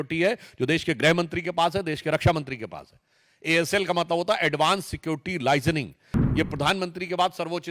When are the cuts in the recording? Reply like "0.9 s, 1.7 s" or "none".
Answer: 6.1 s